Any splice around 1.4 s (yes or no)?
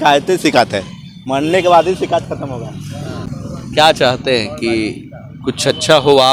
no